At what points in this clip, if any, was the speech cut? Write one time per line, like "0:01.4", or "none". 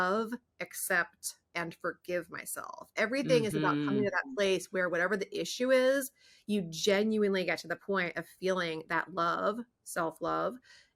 none